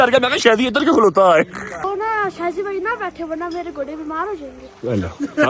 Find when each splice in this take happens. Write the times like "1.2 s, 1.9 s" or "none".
1.9 s